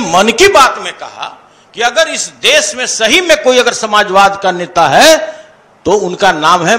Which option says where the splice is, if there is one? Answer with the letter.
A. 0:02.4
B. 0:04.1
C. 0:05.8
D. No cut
D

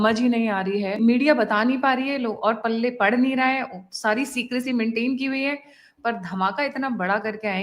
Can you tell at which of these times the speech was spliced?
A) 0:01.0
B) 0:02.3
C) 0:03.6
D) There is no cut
A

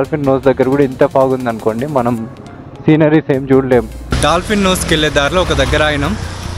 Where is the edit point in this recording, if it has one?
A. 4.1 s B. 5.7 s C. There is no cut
A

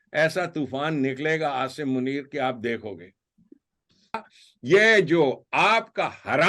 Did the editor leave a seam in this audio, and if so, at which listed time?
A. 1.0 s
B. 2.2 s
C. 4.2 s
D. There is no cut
C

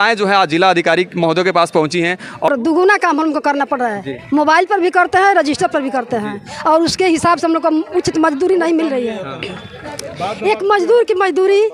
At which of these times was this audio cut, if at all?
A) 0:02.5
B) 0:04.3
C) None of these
A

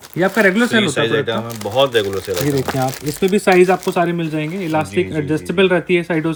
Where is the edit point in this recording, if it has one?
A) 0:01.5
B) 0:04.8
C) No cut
C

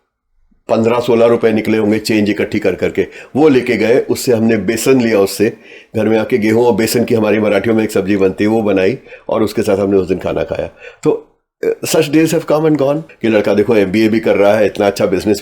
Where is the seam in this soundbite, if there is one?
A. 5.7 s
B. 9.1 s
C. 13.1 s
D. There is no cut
C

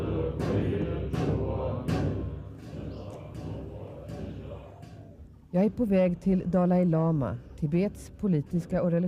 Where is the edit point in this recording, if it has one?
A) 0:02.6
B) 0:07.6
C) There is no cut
C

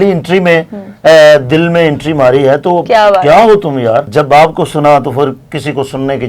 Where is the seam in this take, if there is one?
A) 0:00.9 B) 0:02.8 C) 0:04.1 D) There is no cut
C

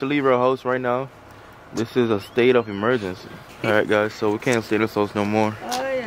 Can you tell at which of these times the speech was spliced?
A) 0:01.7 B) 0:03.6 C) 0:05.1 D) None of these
B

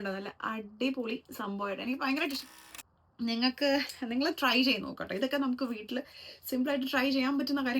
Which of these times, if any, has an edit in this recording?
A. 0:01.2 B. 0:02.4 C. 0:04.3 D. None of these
B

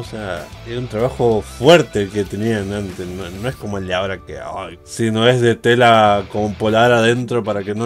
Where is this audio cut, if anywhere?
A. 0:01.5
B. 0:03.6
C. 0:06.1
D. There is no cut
D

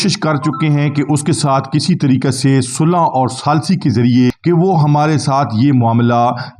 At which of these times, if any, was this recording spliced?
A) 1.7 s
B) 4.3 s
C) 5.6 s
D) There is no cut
B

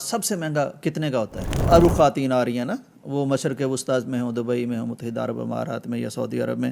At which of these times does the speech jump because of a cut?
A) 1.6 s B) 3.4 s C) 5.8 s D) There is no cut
A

